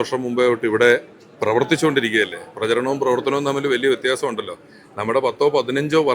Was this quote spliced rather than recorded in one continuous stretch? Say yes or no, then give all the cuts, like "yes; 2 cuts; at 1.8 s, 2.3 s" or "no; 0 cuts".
no; 0 cuts